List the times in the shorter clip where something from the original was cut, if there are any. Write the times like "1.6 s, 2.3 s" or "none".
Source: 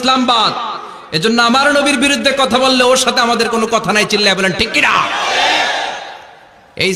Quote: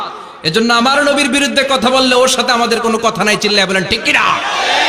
none